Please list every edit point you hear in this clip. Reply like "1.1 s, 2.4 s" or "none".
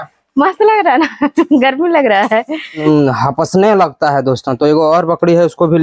2.8 s